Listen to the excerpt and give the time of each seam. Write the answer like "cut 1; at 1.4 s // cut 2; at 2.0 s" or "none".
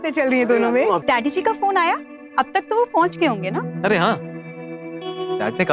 cut 1; at 1.0 s